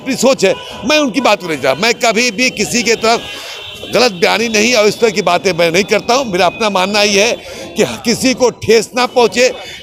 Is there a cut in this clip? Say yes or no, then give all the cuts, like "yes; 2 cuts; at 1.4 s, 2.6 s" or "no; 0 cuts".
no; 0 cuts